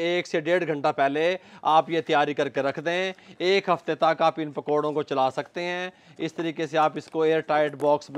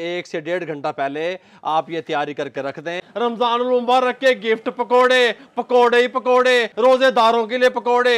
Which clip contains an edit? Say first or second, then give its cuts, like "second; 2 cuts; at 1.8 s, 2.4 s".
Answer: second; 2 cuts; at 3.0 s, 6.7 s